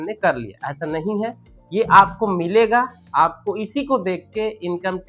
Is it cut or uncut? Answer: uncut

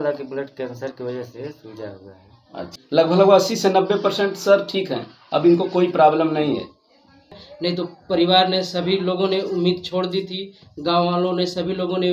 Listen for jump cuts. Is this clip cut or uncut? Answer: cut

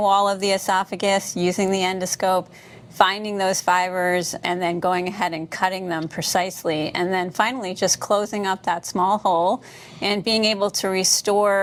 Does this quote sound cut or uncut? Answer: uncut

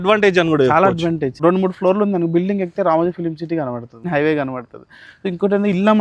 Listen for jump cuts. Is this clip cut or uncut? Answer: cut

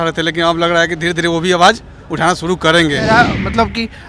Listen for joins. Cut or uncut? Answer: cut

